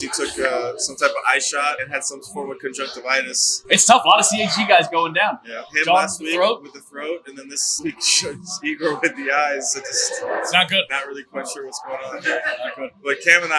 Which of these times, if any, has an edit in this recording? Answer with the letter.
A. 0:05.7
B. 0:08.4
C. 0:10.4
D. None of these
D